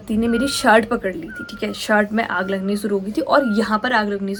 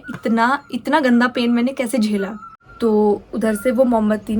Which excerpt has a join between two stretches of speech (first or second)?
second